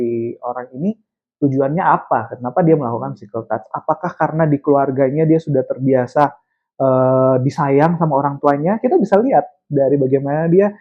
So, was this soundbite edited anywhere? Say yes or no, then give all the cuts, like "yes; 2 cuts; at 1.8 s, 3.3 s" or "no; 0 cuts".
no; 0 cuts